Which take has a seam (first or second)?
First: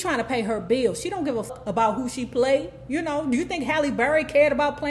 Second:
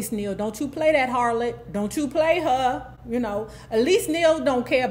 first